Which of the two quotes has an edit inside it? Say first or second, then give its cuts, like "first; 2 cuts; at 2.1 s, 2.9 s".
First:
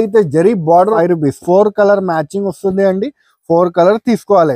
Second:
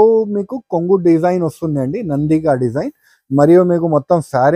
first; 1 cut; at 1.0 s